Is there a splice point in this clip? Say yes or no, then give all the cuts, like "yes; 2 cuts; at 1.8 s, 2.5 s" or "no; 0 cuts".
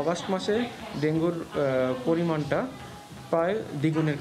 no; 0 cuts